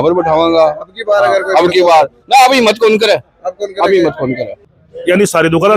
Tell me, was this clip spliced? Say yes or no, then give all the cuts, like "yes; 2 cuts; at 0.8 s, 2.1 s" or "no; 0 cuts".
yes; 1 cut; at 4.6 s